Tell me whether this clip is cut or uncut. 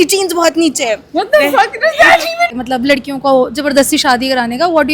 cut